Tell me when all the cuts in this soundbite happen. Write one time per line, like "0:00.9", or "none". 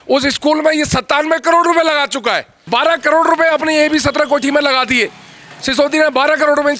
0:02.5